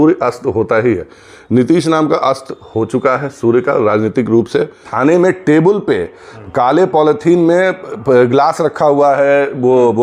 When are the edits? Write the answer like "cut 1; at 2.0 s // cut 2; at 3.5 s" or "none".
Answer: cut 1; at 4.9 s

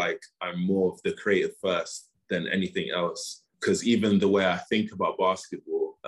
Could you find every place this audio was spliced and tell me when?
none

